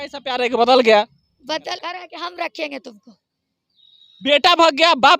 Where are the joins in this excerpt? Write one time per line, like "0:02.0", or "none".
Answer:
0:01.7